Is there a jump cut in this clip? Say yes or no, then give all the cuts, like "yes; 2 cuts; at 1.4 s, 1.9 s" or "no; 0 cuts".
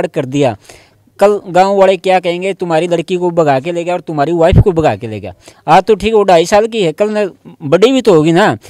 no; 0 cuts